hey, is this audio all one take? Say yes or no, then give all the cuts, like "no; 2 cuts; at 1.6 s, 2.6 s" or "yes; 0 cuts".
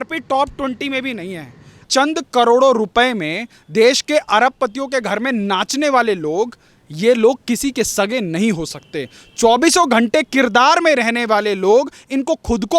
no; 1 cut; at 1.9 s